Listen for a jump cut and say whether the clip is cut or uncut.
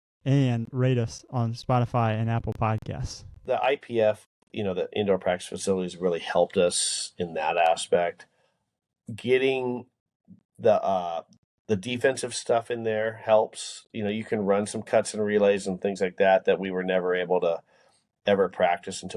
cut